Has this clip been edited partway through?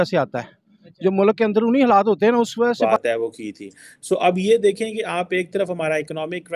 yes; 1 cut; at 2.8 s

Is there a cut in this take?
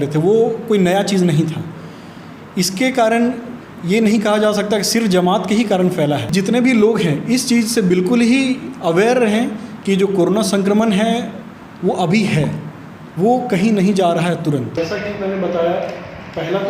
yes; 2 cuts; at 6.3 s, 14.7 s

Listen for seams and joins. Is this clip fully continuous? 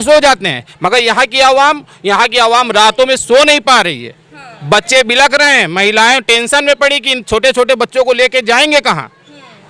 yes; 0 cuts

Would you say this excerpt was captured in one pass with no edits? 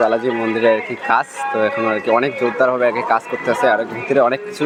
yes; 0 cuts

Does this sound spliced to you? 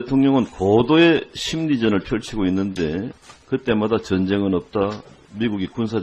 no; 0 cuts

